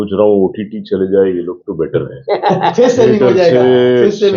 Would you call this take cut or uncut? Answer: uncut